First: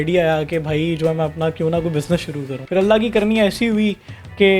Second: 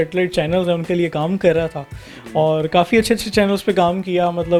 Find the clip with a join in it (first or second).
first